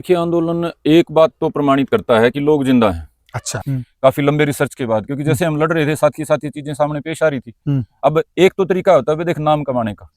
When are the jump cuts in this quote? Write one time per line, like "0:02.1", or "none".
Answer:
0:03.4

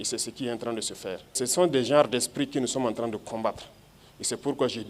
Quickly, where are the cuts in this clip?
0:01.3

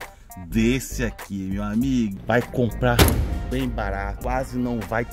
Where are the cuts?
0:02.1
0:04.1

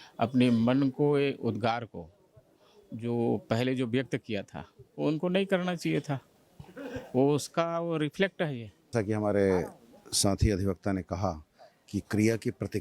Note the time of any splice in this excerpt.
0:08.9

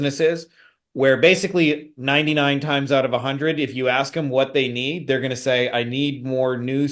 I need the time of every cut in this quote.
none

